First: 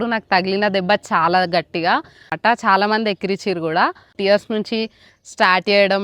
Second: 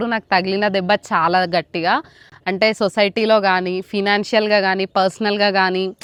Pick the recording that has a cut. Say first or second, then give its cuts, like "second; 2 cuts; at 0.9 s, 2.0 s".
first; 2 cuts; at 2.3 s, 4.1 s